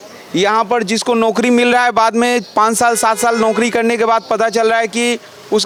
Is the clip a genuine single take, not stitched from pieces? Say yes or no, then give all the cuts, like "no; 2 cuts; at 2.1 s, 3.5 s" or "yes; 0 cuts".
yes; 0 cuts